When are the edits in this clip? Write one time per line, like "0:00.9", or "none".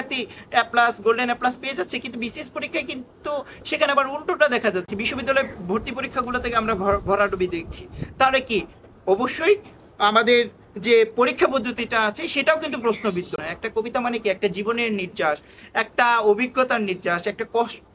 0:13.4